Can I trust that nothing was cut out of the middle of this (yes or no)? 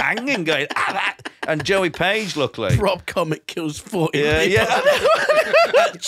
yes